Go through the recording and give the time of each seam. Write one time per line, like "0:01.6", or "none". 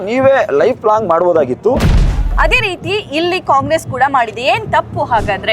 0:01.9